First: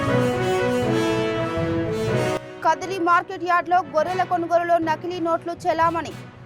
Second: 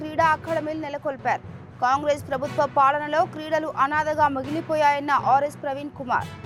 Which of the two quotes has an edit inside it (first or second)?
first